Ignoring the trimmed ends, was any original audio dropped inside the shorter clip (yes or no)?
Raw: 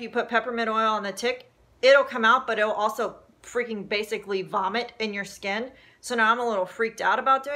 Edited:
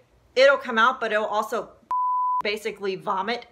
no